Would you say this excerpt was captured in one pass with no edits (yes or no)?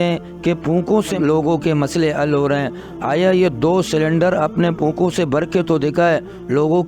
no